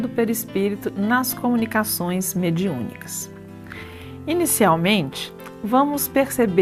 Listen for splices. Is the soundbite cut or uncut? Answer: uncut